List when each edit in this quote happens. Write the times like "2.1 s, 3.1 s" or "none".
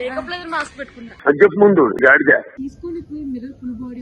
2.7 s